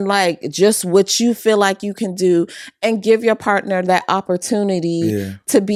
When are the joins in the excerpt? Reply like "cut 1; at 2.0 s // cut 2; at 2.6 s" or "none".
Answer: none